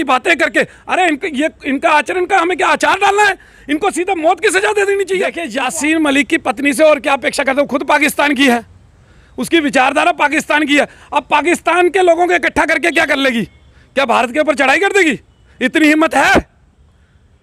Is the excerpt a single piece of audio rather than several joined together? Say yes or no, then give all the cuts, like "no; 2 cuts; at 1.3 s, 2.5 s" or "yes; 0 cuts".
no; 1 cut; at 5.5 s